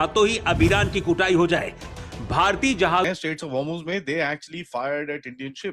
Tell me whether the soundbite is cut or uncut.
cut